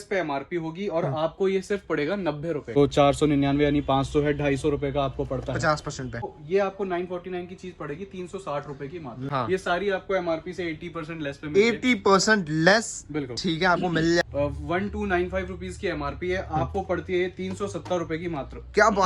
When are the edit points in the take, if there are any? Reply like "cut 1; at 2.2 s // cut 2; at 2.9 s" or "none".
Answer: cut 1; at 2.8 s // cut 2; at 6.4 s // cut 3; at 9.2 s // cut 4; at 14.2 s